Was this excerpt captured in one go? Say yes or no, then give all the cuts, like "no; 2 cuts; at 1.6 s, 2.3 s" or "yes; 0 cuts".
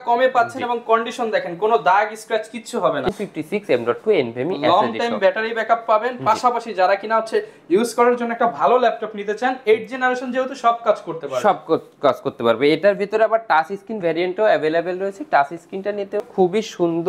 no; 2 cuts; at 3.1 s, 16.2 s